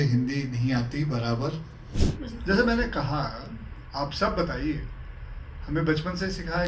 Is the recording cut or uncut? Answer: cut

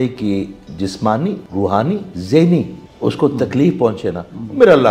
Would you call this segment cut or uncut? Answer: cut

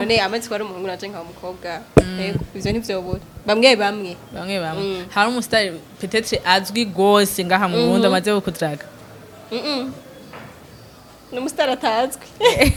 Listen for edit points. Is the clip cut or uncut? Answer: uncut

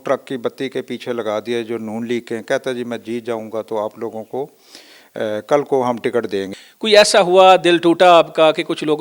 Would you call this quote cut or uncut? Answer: cut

